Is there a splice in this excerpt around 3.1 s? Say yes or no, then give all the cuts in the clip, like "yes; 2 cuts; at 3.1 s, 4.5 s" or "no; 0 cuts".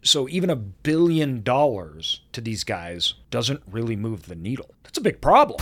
yes; 2 cuts; at 3.1 s, 4.8 s